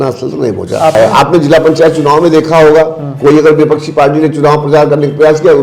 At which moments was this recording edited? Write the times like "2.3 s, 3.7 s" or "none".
1.0 s